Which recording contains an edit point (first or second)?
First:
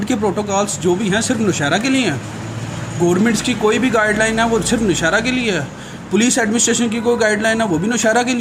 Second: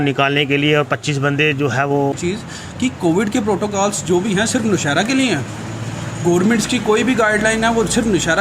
second